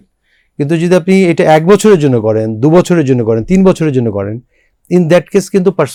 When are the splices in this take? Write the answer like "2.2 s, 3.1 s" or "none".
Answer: none